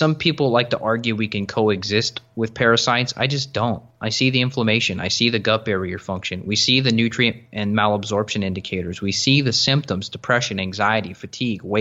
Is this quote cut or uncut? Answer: uncut